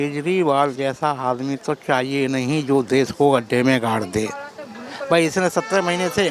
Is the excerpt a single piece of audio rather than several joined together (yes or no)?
yes